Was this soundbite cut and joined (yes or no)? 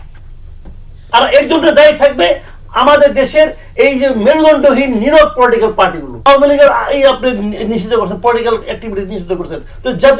yes